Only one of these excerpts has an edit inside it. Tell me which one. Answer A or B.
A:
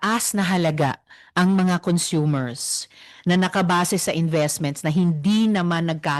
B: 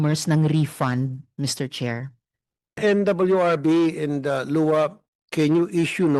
B